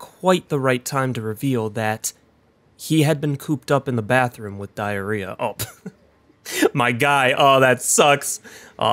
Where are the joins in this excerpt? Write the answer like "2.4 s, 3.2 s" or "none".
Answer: none